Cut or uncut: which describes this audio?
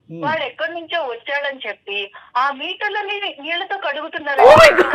uncut